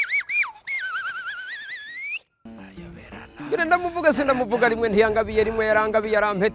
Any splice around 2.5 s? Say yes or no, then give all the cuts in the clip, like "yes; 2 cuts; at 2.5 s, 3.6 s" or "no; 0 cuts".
yes; 1 cut; at 2.5 s